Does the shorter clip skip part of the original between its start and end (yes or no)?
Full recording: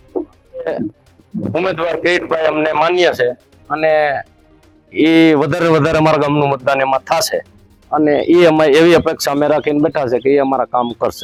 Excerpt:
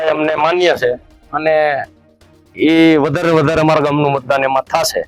no